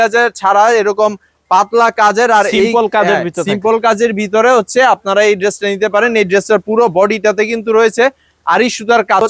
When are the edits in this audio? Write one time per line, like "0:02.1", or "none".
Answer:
none